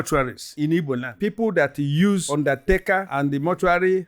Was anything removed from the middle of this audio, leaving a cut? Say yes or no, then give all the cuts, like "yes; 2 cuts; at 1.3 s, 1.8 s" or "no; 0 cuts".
yes; 1 cut; at 1.1 s